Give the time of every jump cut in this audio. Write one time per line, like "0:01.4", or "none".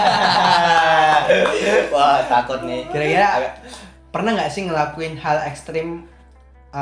none